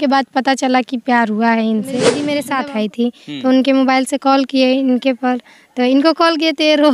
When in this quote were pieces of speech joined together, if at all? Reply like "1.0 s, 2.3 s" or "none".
2.4 s